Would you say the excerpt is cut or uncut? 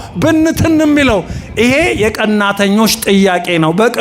uncut